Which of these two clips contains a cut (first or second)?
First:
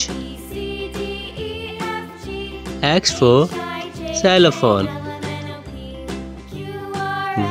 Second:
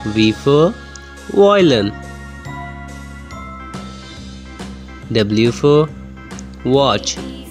second